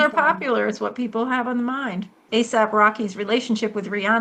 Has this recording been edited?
yes; 1 cut; at 2.2 s

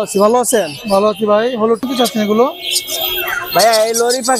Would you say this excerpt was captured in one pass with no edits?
no; 1 cut; at 1.8 s

